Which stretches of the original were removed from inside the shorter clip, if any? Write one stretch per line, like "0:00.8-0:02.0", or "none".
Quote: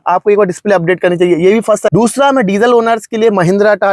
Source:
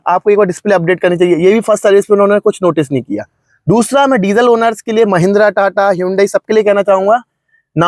0:01.9-0:03.6